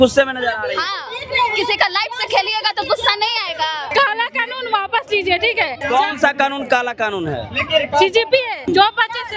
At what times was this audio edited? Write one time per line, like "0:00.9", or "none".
0:03.9
0:05.8
0:08.6